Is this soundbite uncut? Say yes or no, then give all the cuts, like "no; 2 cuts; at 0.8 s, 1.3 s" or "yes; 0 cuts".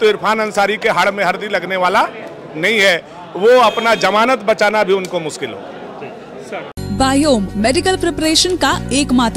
yes; 0 cuts